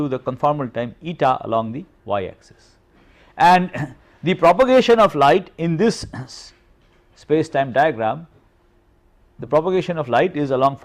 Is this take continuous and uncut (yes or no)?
yes